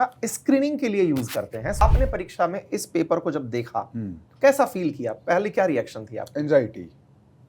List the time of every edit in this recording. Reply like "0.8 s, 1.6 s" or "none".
1.8 s